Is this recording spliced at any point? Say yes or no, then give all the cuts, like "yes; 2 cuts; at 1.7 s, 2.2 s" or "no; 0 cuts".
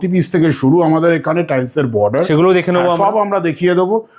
no; 0 cuts